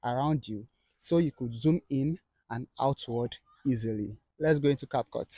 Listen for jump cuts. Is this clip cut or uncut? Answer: cut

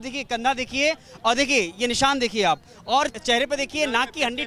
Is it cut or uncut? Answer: cut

